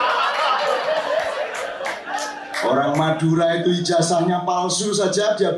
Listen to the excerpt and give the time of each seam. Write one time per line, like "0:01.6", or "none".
none

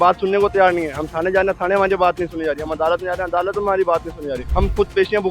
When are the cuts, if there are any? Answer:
0:04.4

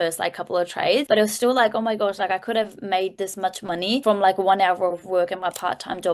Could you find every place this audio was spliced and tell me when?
0:01.0
0:04.0

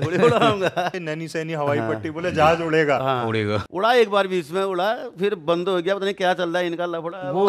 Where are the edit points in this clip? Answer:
0:01.0
0:03.6

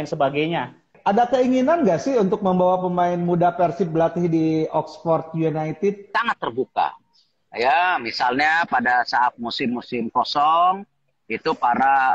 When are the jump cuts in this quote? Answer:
0:00.9
0:06.0

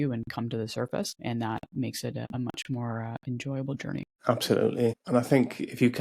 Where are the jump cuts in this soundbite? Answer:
0:01.2
0:02.3
0:04.1
0:05.0

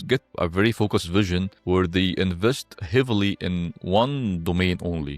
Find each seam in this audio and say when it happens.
none

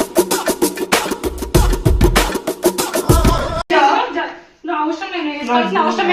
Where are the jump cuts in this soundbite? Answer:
none

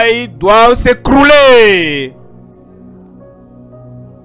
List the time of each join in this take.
0:02.6

